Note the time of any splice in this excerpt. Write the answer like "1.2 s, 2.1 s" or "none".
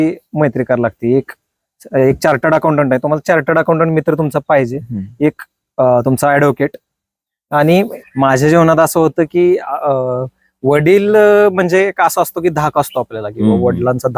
7.9 s